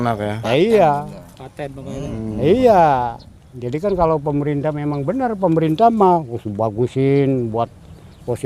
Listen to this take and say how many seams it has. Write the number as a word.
zero